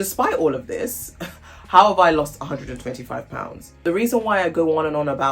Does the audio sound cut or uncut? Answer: cut